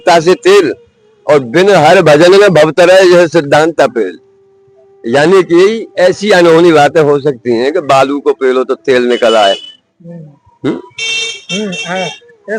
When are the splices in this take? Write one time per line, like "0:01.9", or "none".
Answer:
none